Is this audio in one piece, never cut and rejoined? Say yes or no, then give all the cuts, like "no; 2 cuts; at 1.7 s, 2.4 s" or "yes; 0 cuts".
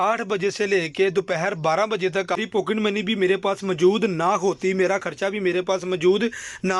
no; 1 cut; at 2.4 s